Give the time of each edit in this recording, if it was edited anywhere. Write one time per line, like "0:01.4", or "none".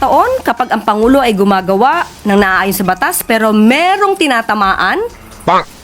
none